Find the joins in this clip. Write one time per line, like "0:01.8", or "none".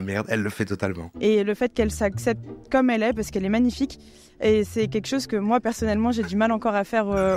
none